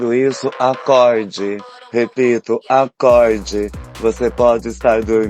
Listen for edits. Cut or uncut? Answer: uncut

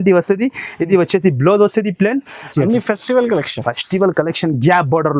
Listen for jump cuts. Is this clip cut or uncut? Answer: cut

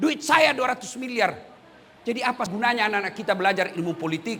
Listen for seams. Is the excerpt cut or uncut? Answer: cut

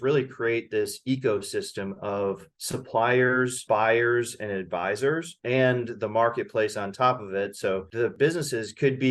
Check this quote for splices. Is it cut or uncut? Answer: cut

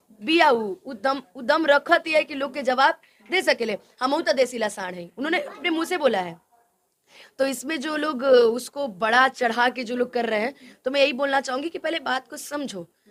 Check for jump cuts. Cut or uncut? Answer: uncut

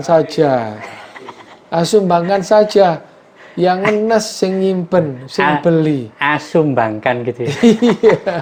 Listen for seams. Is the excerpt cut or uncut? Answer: uncut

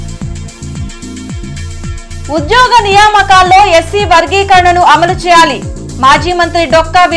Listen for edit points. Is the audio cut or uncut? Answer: cut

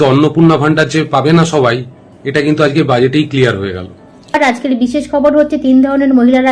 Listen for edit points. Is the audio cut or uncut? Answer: cut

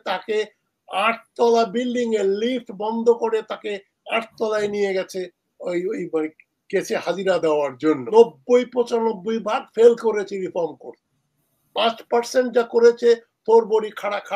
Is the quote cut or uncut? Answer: cut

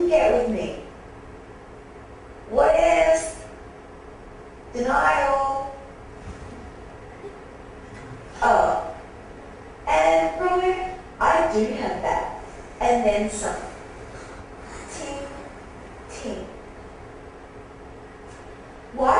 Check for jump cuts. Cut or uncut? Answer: uncut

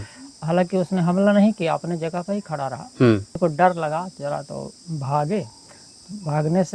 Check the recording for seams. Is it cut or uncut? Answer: cut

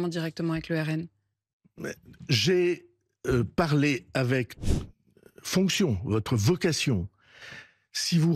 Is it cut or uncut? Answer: cut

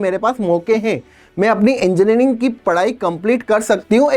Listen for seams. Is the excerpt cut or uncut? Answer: uncut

